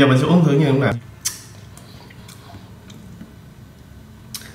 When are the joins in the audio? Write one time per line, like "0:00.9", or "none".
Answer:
0:00.9

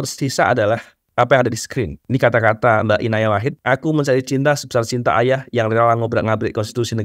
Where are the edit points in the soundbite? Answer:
0:01.0
0:02.0
0:03.5

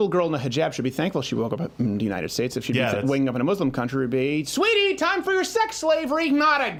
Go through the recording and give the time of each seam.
none

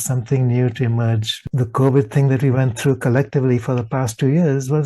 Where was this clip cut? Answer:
0:01.4

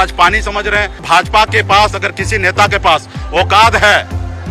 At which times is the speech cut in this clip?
0:01.0

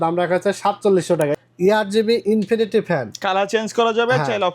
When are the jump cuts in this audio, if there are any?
0:01.4

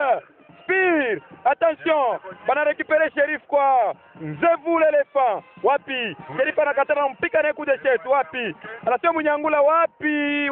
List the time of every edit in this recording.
none

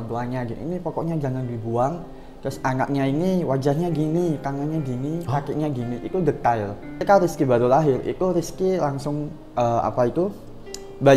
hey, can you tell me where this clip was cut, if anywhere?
0:07.0

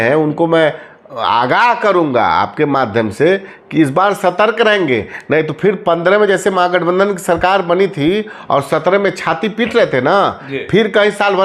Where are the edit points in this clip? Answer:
none

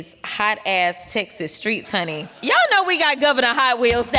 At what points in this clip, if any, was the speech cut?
0:02.3

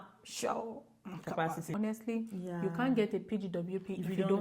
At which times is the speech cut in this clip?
0:01.7

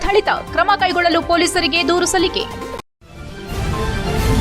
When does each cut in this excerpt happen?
0:02.8

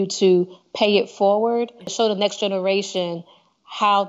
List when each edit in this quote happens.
0:01.9

